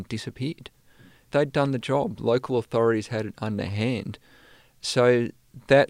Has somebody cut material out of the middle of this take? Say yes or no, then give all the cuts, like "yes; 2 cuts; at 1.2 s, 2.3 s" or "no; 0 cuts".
yes; 1 cut; at 1.3 s